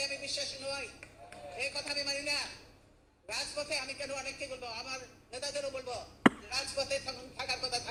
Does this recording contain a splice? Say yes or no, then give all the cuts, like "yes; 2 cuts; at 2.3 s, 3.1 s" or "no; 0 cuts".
no; 0 cuts